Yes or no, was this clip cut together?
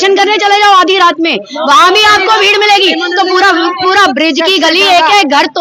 no